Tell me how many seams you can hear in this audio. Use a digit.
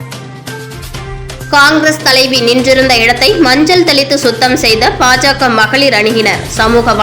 1